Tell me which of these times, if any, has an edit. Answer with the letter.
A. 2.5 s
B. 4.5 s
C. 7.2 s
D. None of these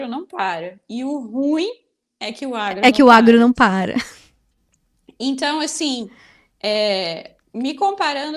D